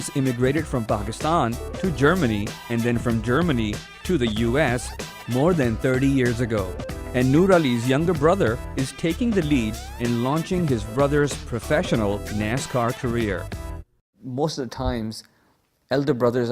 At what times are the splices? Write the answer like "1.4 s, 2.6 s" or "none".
2.1 s